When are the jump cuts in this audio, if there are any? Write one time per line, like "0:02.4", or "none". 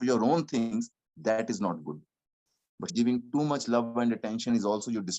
0:02.9

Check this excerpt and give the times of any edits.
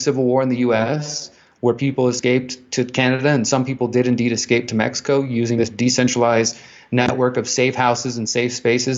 none

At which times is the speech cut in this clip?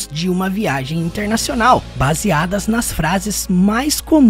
0:01.9

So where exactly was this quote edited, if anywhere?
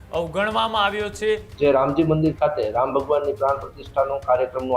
0:01.5

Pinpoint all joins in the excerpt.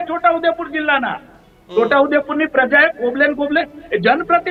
none

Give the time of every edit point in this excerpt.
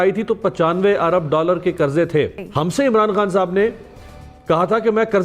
0:02.4

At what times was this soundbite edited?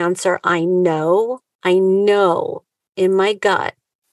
0:01.5

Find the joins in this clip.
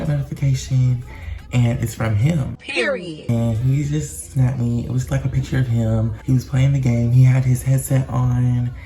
none

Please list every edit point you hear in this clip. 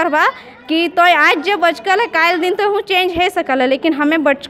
none

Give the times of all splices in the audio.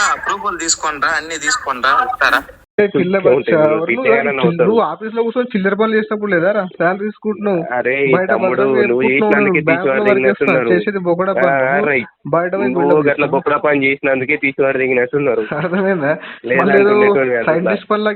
0:02.8

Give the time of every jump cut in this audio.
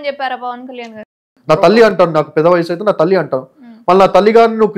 0:00.9

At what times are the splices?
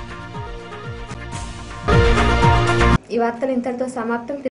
none

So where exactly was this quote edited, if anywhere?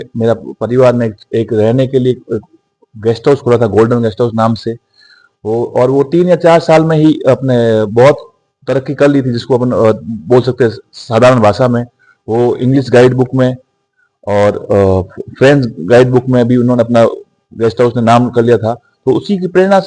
none

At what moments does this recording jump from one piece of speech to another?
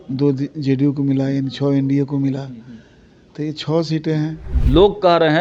0:04.5

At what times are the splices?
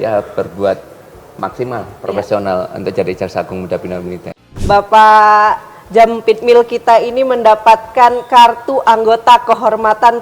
0:04.3

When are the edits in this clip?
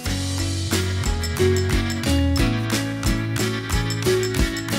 none

